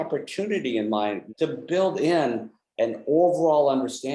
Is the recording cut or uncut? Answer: cut